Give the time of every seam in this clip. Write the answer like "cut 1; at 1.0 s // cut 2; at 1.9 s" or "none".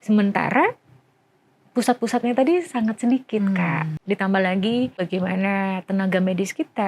cut 1; at 3.5 s // cut 2; at 5.1 s